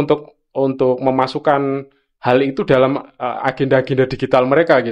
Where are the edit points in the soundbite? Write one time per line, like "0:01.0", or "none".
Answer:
none